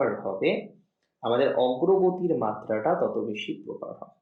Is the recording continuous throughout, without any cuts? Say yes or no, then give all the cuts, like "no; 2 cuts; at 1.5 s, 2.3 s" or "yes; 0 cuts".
yes; 0 cuts